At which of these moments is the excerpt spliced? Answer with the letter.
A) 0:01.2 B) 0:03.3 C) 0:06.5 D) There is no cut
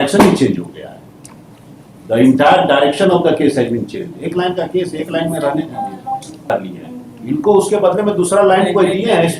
C